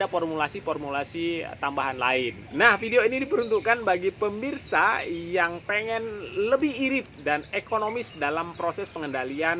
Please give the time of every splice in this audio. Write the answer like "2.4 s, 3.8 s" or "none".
2.4 s